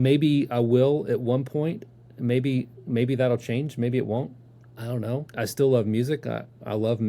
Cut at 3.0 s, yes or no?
no